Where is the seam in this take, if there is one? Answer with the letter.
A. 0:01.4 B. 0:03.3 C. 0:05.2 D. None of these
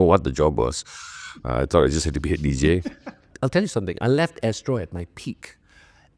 B